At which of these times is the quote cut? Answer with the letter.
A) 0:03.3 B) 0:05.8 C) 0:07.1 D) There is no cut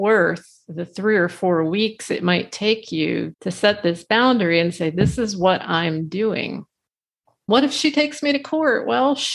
A